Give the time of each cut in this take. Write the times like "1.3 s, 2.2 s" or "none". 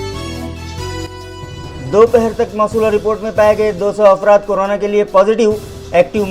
1.6 s